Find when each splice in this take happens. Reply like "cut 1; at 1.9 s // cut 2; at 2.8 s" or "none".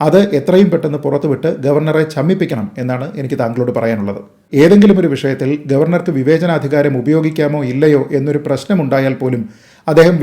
cut 1; at 4.4 s